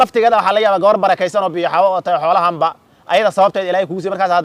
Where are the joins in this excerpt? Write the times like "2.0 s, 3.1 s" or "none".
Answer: none